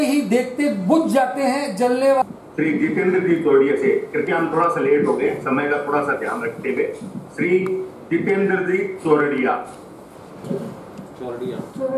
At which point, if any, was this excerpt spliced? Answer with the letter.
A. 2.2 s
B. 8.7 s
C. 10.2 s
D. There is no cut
A